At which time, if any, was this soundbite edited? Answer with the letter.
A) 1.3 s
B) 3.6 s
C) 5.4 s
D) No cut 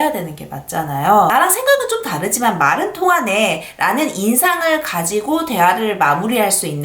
A